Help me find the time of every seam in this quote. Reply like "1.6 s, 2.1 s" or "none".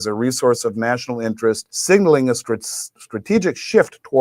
1.7 s